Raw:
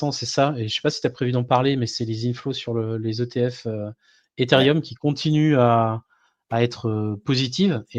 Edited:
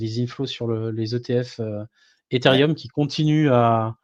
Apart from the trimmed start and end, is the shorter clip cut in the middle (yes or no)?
no